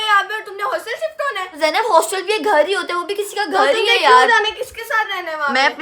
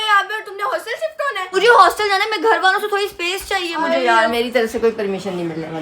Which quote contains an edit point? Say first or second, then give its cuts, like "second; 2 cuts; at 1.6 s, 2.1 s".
second; 2 cuts; at 1.4 s, 4.3 s